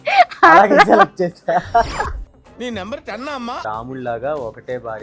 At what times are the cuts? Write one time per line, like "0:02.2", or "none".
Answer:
0:03.6